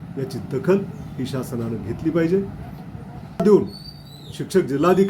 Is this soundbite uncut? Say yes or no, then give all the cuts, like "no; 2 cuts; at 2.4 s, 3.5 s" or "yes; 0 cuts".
no; 1 cut; at 3.4 s